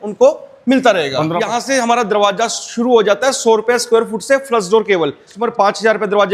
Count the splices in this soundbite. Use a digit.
2